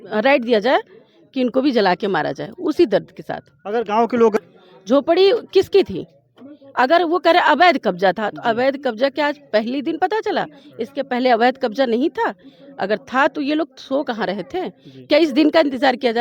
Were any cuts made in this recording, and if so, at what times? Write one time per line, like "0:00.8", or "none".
0:04.3